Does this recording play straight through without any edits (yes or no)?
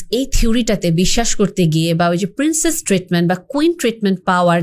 yes